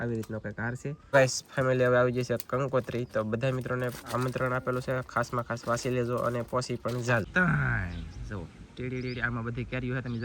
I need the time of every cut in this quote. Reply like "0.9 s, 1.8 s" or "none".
0.9 s, 7.3 s